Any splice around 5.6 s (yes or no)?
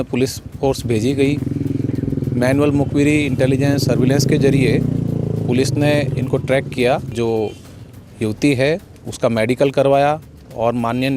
no